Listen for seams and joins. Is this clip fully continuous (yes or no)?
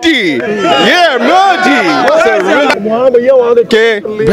no